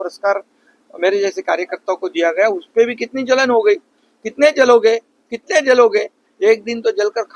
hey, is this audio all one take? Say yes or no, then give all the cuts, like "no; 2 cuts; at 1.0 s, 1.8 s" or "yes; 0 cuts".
yes; 0 cuts